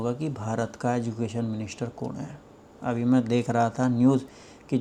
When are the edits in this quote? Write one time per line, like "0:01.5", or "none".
none

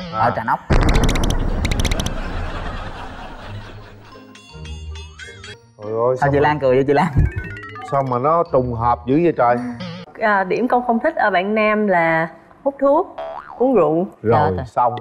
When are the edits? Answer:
0:05.6
0:10.0

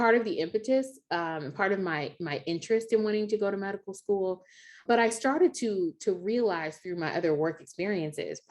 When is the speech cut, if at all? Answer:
0:04.8

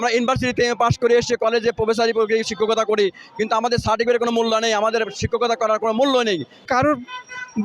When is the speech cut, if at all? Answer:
0:06.7

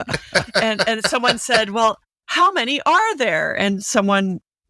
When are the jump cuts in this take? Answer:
0:02.2

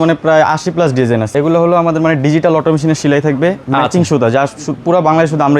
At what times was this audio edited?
0:01.3

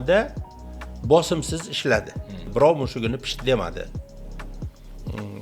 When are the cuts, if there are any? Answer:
0:02.5

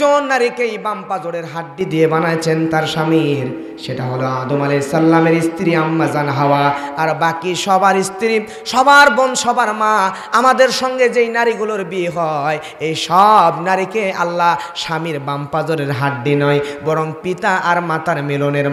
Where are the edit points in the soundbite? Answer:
none

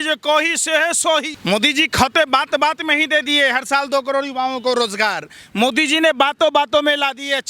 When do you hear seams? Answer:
0:01.3

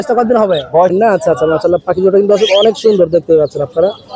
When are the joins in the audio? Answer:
0:00.9

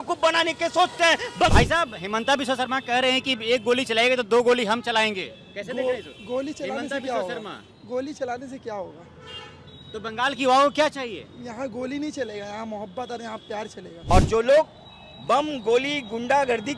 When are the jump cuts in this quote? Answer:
0:01.5
0:14.1

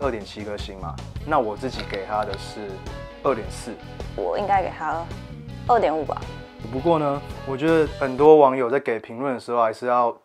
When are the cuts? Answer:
none

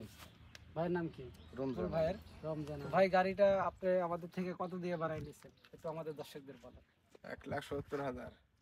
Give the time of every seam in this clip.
none

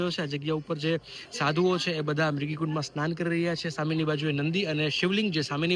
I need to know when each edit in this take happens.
none

